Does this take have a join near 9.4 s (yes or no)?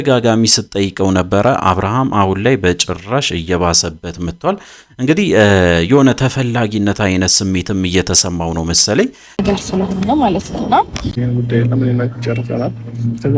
yes